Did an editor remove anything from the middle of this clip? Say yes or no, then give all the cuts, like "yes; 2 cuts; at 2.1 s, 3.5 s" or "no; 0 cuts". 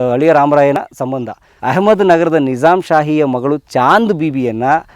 yes; 1 cut; at 0.9 s